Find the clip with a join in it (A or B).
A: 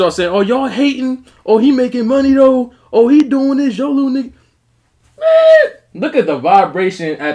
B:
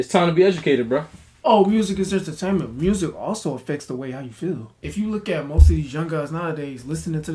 B